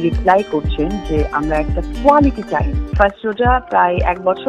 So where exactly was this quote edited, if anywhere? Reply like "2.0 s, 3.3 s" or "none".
2.8 s